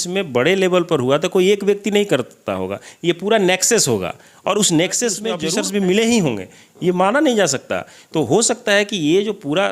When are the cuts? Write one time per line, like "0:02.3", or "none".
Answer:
0:05.4